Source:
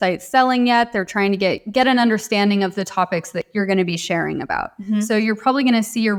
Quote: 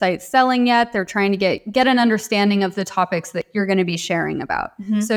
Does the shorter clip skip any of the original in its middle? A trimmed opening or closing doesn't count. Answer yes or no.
no